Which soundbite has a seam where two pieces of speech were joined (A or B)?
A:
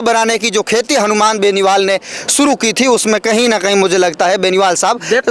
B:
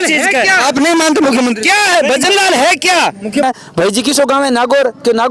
B